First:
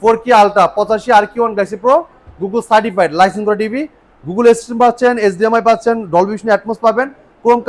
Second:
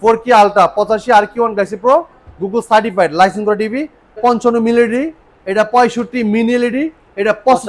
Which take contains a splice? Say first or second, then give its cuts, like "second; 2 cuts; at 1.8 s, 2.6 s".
second; 1 cut; at 4.2 s